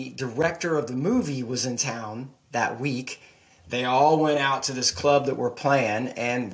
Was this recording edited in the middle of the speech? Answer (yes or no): no